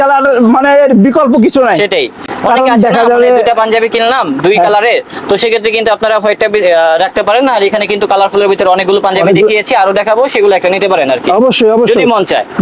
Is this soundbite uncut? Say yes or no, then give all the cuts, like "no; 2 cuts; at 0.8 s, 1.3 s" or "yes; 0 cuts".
yes; 0 cuts